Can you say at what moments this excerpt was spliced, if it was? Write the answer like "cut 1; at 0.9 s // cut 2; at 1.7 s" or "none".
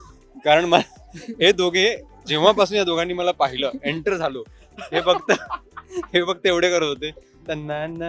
none